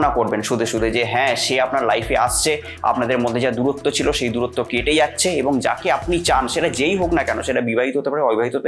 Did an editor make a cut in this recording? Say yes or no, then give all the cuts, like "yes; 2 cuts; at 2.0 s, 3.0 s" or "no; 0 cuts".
no; 0 cuts